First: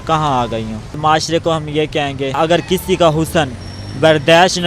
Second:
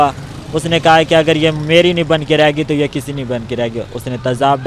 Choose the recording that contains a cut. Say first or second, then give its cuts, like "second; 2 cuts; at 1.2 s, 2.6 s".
first; 2 cuts; at 1.0 s, 2.4 s